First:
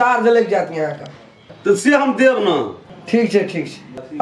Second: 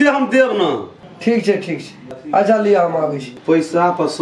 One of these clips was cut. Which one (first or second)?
second